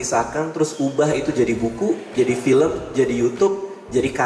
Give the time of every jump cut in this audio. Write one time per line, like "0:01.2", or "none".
none